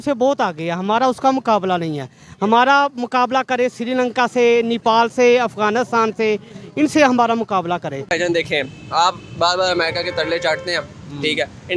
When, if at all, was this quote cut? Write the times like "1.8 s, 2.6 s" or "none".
8.1 s